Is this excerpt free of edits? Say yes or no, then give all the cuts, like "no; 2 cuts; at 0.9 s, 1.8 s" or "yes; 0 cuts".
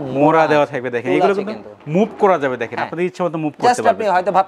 yes; 0 cuts